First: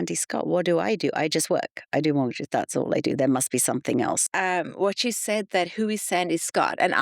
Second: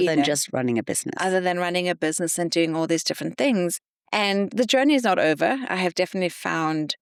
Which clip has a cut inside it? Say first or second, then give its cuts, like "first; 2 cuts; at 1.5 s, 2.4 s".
first; 1 cut; at 4.2 s